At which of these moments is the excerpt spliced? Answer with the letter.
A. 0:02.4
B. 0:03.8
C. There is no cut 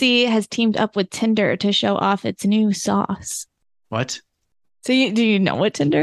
C